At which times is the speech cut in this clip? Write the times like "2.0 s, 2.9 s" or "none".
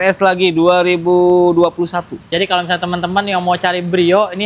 2.2 s